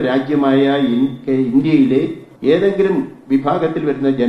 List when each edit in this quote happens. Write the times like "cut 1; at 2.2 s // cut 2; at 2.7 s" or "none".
cut 1; at 2.2 s